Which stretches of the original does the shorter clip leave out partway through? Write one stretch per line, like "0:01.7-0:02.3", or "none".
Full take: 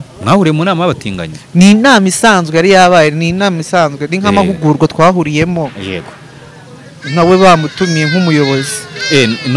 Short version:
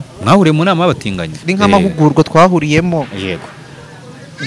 0:01.4-0:04.0